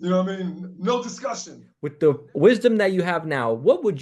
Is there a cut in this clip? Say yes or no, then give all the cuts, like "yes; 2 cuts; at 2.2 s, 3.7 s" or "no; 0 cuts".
yes; 1 cut; at 1.8 s